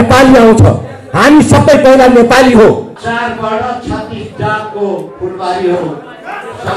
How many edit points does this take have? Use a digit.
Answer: 1